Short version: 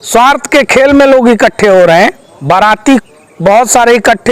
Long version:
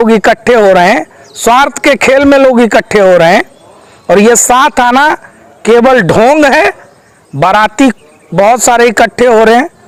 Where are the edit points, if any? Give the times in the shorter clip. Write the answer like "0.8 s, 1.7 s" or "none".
2.3 s